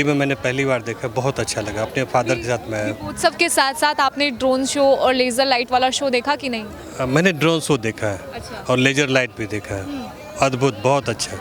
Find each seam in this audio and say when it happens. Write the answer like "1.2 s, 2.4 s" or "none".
none

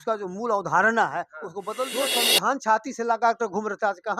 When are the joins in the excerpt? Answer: 2.1 s

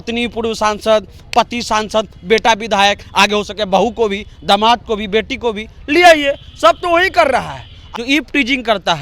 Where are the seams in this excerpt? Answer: 7.8 s

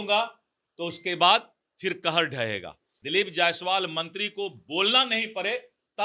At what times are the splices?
2.9 s

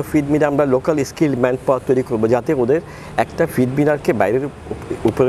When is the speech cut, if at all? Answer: none

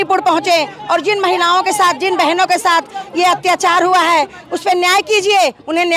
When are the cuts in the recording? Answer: none

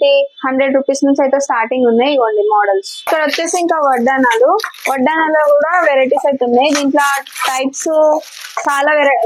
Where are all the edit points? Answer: 3.0 s

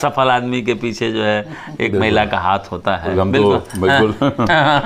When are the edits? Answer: 3.1 s

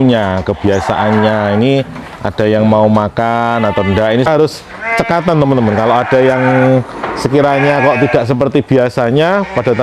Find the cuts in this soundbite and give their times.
4.3 s

